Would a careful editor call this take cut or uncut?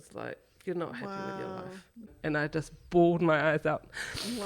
cut